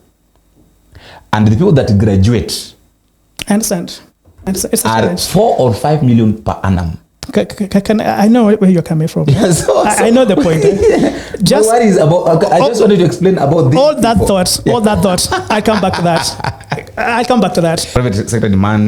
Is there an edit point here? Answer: yes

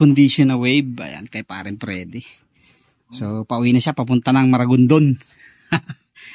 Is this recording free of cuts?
yes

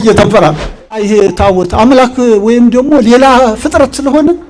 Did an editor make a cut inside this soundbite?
yes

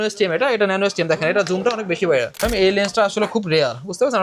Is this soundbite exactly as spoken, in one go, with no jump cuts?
no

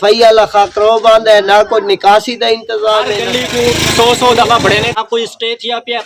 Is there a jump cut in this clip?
yes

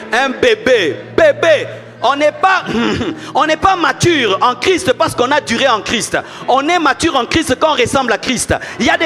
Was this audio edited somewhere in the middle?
no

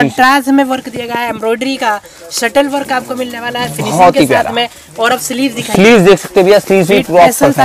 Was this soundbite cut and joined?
no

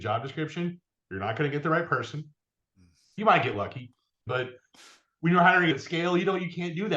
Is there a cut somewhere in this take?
yes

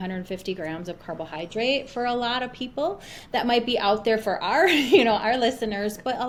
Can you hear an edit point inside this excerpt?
no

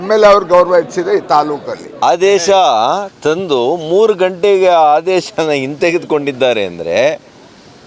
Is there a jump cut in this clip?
yes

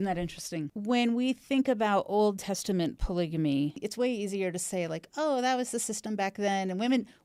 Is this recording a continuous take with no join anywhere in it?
yes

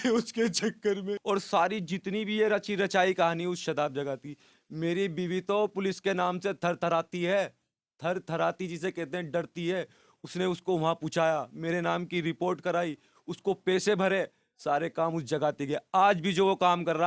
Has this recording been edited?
yes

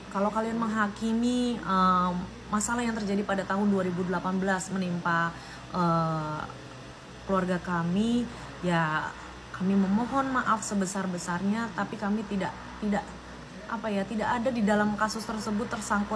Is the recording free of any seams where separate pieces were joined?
yes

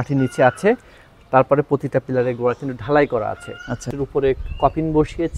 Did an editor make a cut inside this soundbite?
yes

